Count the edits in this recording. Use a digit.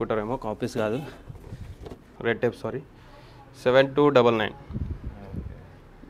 1